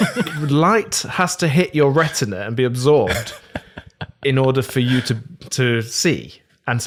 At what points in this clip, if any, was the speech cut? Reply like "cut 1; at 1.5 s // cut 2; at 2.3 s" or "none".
none